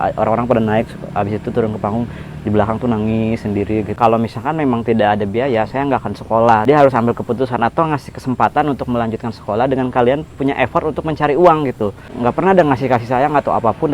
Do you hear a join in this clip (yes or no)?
yes